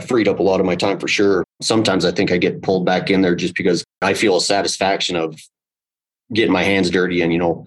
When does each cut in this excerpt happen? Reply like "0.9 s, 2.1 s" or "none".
1.6 s, 4.0 s